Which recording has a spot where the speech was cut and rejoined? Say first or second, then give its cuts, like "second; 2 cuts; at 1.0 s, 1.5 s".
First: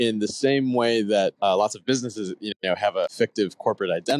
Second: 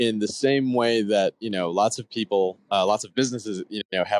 first; 2 cuts; at 1.4 s, 3.1 s